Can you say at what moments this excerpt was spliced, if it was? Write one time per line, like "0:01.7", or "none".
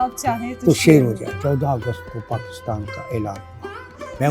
0:01.3